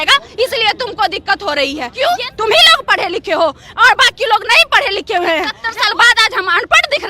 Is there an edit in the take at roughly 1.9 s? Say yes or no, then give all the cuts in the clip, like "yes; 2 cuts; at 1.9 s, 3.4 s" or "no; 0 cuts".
yes; 2 cuts; at 1.9 s, 5.6 s